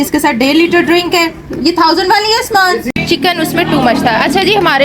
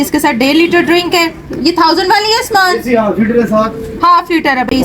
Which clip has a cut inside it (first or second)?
first